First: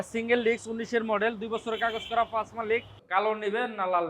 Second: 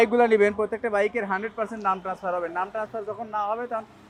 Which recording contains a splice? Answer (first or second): first